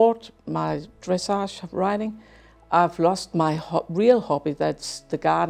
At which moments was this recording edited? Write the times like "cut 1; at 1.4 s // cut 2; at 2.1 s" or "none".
none